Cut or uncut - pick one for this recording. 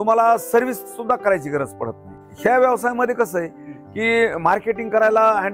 cut